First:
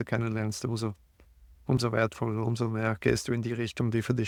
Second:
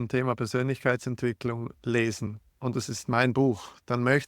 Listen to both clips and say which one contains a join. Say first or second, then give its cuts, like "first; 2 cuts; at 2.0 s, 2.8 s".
second; 1 cut; at 2.3 s